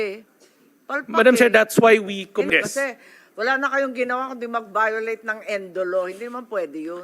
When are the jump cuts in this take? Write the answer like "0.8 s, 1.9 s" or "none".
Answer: 2.5 s

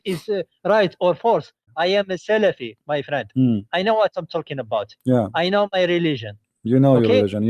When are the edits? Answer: 1.7 s

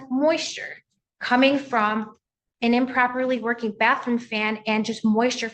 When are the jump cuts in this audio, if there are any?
none

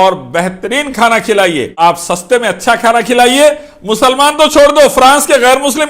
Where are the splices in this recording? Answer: 1.8 s

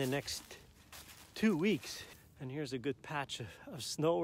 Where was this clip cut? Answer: 2.0 s

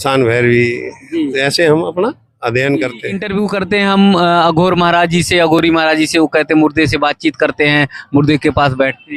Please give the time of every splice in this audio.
3.2 s

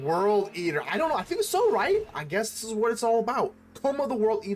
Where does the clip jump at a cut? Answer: 2.2 s

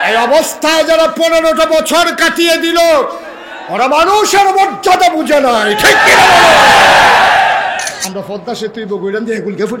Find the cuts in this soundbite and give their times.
8.0 s

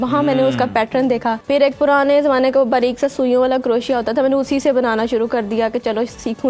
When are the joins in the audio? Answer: 1.4 s

